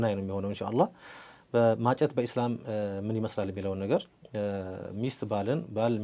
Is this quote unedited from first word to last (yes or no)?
yes